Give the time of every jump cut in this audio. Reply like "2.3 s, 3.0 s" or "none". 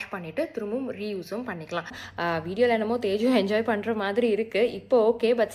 2.0 s